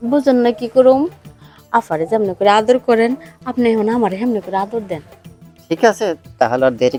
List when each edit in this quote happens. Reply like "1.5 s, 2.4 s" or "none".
none